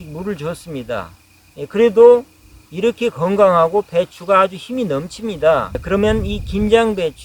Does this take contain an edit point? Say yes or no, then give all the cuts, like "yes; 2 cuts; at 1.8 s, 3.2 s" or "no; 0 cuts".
yes; 1 cut; at 5.8 s